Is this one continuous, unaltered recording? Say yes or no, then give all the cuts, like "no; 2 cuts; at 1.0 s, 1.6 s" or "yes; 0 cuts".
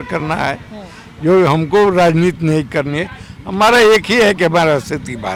yes; 0 cuts